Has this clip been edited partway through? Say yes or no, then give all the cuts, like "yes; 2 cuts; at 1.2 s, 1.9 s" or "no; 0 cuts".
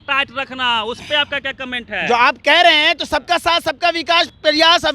no; 0 cuts